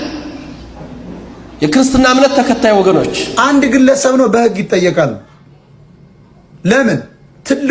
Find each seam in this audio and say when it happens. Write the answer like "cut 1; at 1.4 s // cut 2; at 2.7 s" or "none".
cut 1; at 3.2 s